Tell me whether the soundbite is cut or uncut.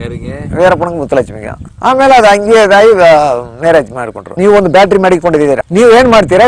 cut